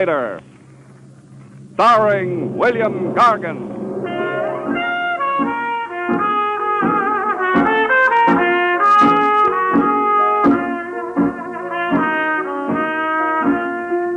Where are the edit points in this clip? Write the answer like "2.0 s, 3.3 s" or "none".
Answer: none